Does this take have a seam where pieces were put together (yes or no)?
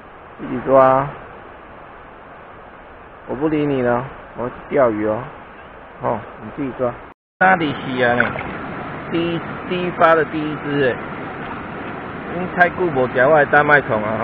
yes